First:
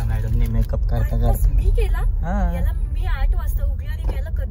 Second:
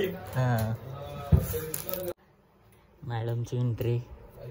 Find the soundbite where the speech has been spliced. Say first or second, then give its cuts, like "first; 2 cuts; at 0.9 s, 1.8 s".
second; 1 cut; at 2.2 s